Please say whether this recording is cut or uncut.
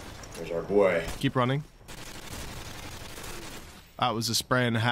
cut